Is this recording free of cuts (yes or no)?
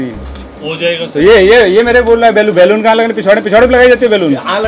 yes